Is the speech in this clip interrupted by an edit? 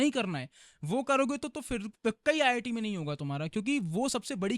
no; 0 cuts

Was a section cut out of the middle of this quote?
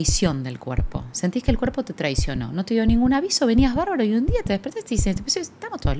no; 0 cuts

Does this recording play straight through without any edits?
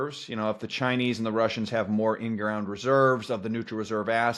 yes; 0 cuts

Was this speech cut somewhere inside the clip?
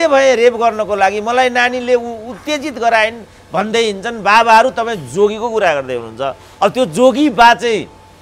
no; 0 cuts

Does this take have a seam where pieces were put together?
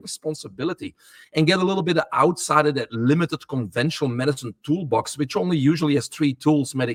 no; 0 cuts

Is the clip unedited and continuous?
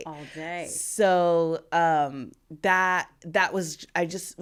yes; 0 cuts

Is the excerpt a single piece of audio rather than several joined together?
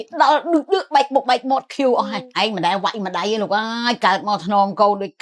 no; 1 cut; at 2.2 s

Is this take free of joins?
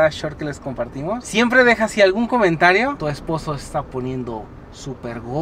no; 2 cuts; at 1.2 s, 3.0 s

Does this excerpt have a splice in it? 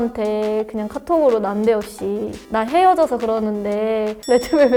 no; 0 cuts

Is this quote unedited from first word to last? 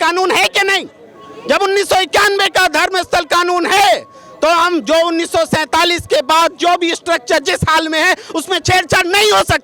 yes; 0 cuts

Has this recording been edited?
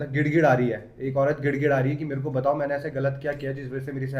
no; 0 cuts

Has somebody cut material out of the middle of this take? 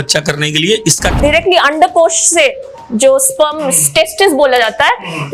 yes; 1 cut; at 1.2 s

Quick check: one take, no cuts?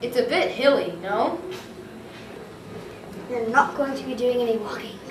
no; 1 cut; at 2.5 s

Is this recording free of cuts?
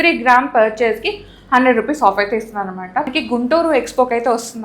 no; 1 cut; at 3.1 s

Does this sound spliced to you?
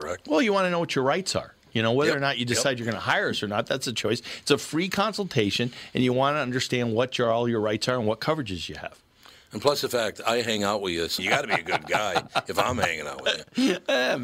no; 0 cuts

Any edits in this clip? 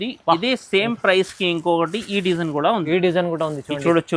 no; 0 cuts

